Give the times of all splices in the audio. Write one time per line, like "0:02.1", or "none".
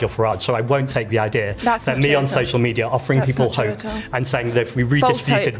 none

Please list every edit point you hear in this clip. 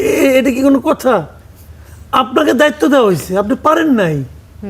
none

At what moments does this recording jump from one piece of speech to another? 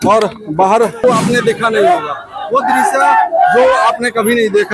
0:01.0

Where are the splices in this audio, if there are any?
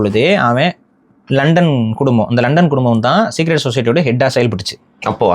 none

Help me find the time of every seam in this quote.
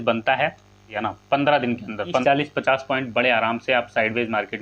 0:01.0
0:02.2

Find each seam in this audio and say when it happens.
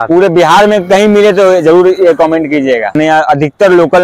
0:02.9

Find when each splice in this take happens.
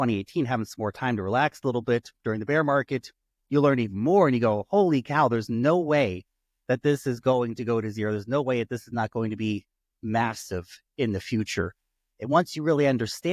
none

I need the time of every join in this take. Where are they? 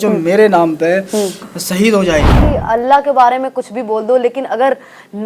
0:02.4

